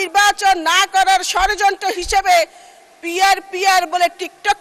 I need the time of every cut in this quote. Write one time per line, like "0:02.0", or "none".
none